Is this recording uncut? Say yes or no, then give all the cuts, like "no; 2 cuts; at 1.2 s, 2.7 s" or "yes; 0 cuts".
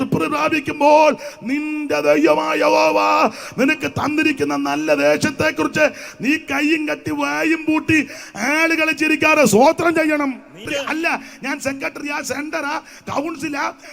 no; 1 cut; at 10.6 s